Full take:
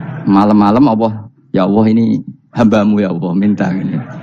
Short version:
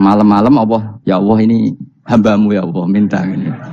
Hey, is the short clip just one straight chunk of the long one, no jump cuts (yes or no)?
no